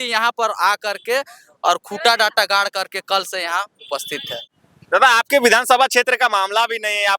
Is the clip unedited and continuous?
no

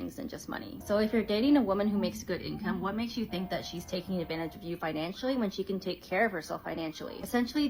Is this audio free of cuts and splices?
no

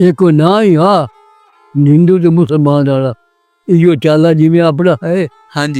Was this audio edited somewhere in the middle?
no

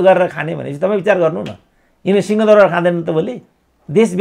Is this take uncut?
yes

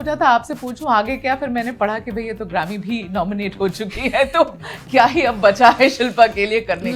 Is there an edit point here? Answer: no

